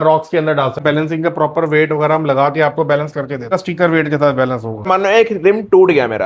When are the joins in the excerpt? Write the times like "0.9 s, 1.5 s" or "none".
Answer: 0.8 s, 3.5 s, 4.9 s